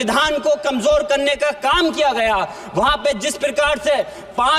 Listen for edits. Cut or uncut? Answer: uncut